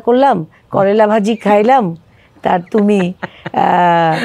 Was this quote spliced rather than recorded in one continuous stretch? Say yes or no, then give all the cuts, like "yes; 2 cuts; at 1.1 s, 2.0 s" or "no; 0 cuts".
no; 0 cuts